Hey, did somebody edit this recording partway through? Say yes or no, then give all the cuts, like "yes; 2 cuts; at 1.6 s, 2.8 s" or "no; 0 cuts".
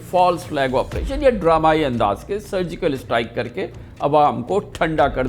no; 0 cuts